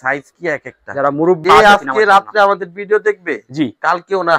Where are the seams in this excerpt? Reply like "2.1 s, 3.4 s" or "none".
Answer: 1.4 s

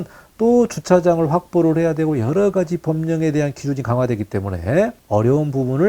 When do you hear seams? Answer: 5.0 s

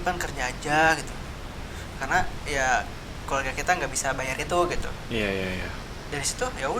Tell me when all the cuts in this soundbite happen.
none

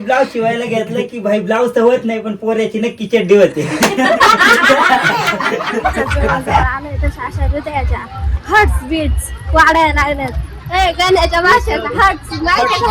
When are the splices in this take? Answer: 6.0 s

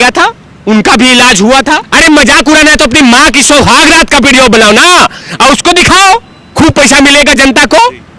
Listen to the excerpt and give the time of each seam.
1.9 s

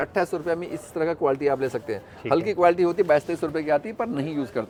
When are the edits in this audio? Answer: none

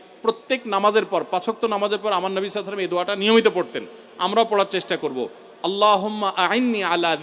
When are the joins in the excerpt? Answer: none

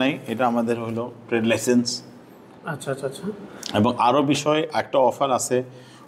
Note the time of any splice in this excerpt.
none

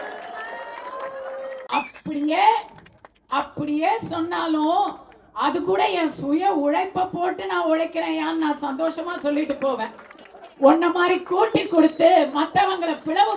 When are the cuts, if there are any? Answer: 1.6 s

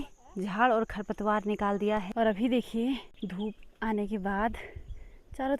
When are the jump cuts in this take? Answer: 2.1 s, 3.1 s

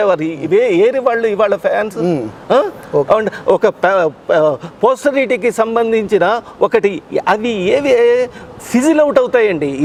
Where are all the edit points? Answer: none

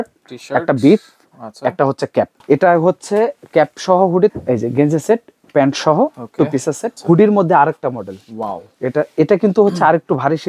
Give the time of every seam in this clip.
2.4 s, 4.3 s, 6.9 s

